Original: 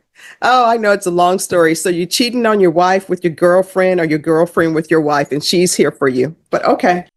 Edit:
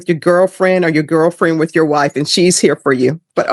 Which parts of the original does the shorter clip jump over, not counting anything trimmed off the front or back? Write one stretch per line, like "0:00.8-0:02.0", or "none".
none

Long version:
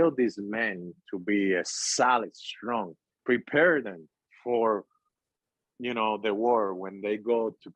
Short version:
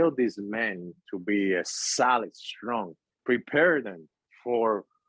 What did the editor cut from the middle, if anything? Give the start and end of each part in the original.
none

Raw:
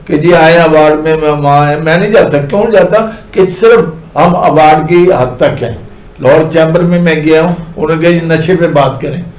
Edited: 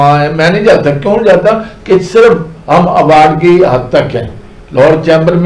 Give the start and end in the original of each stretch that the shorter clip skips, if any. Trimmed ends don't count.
none

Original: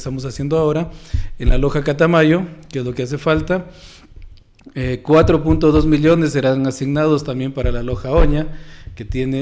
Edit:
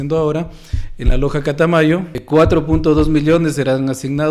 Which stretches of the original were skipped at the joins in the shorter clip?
0:02.6-0:05.0

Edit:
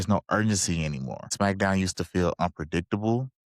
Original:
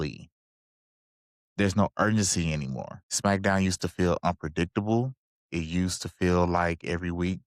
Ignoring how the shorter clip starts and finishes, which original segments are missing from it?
0:02.9-0:03.0

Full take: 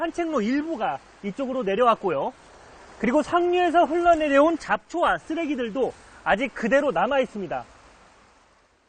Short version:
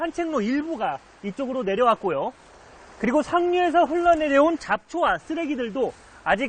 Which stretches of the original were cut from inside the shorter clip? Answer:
none

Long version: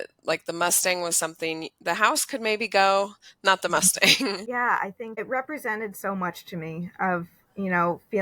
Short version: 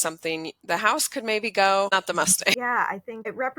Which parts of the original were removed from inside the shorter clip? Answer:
0:03.4-0:04.1

